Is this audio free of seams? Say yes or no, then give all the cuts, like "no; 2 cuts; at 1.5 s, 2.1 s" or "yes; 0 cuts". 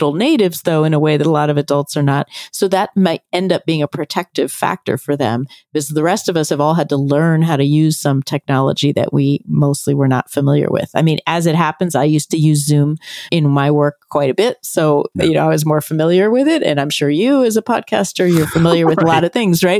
no; 1 cut; at 13.3 s